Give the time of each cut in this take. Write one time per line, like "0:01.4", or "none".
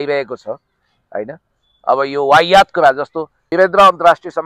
0:03.5

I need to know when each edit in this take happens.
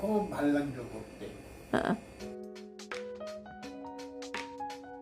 0:02.2
0:03.5

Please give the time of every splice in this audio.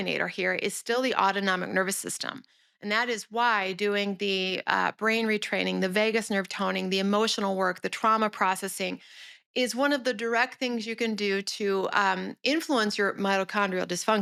none

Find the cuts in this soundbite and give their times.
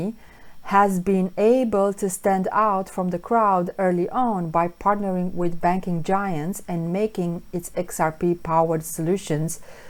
none

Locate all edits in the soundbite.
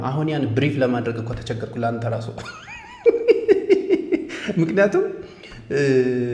none

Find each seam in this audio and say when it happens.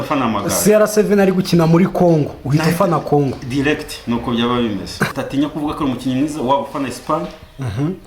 0:05.1

